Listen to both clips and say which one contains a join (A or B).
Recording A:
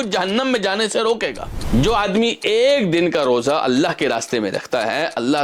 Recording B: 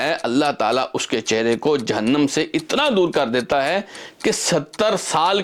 A